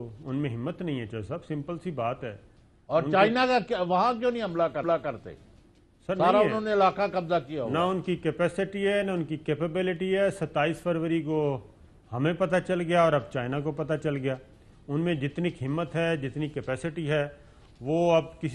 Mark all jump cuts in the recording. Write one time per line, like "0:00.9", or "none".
none